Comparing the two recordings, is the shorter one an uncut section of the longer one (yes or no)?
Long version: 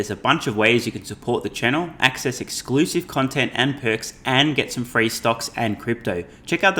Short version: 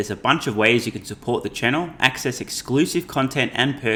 yes